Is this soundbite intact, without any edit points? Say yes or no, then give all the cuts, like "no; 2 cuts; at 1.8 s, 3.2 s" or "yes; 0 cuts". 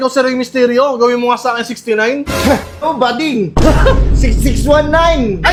yes; 0 cuts